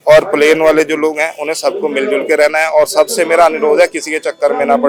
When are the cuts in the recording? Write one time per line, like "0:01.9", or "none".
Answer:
none

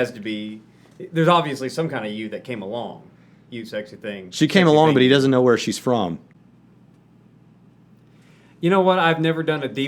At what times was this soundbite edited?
none

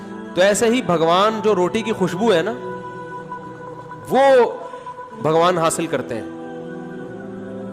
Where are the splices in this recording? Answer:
0:06.3

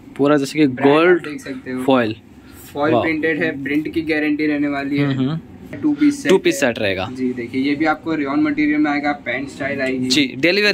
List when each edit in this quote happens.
0:05.8

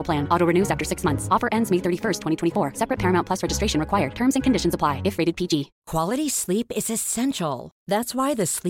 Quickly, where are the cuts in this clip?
none

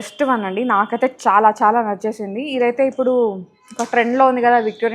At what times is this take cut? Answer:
none

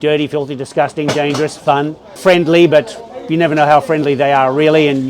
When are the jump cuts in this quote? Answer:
0:02.0

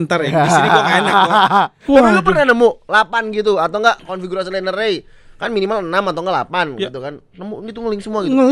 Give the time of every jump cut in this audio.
0:01.8

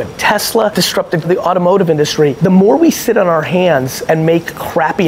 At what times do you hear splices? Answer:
0:01.2
0:02.4
0:03.9

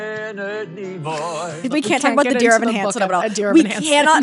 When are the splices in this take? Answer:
0:01.6

